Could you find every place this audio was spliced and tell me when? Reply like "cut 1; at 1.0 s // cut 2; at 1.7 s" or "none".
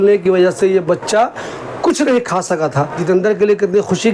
cut 1; at 3.0 s